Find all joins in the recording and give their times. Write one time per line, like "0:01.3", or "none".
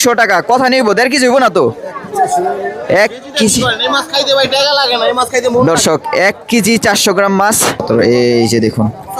0:07.8